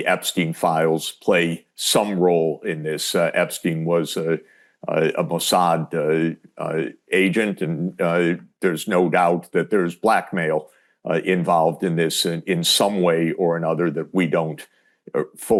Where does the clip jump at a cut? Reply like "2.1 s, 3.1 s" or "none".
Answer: none